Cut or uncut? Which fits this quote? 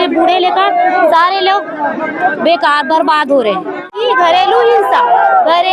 uncut